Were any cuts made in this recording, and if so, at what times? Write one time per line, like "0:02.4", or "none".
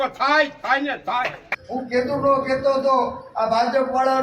0:01.5